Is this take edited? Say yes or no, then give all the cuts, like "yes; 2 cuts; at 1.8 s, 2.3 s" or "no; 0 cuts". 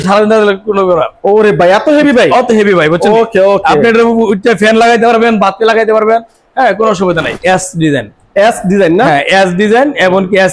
yes; 1 cut; at 7.4 s